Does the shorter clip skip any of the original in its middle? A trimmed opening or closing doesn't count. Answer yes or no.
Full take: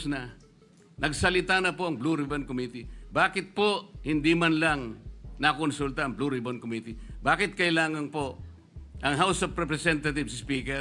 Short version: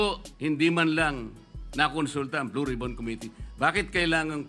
no